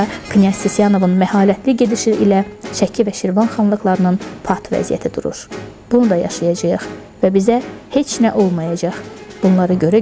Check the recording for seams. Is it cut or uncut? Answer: uncut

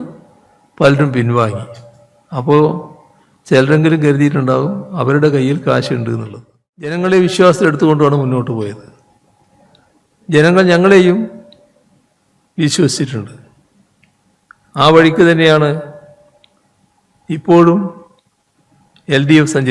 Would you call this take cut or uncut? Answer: cut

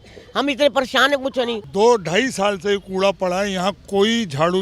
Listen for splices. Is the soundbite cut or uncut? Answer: cut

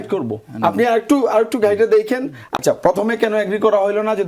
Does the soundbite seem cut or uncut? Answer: cut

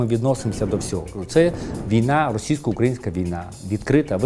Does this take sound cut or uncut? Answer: cut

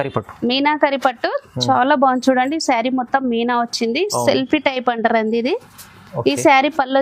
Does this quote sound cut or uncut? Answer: uncut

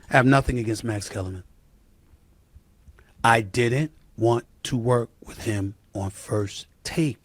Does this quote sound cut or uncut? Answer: uncut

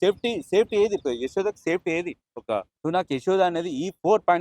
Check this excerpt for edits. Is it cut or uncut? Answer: cut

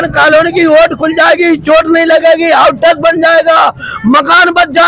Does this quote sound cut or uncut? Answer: uncut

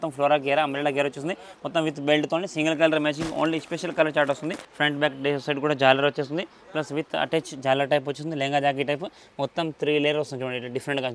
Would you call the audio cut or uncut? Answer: cut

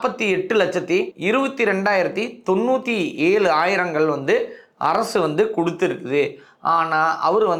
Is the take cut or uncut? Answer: uncut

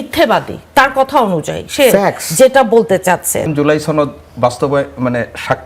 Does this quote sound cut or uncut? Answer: cut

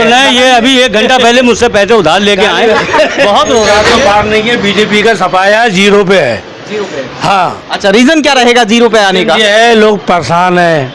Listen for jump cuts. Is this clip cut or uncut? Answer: cut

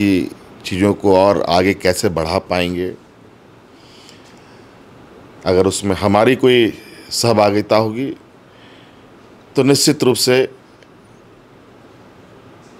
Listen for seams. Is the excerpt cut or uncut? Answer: uncut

